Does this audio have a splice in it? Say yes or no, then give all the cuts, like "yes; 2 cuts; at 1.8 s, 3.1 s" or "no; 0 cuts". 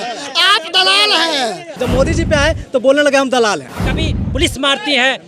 yes; 2 cuts; at 1.8 s, 3.7 s